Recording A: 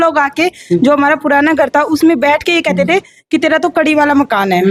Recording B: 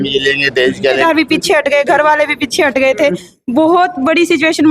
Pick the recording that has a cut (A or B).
B